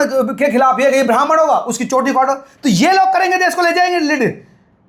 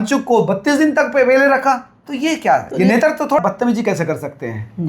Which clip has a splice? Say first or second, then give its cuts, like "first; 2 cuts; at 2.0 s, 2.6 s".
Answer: second; 1 cut; at 3.4 s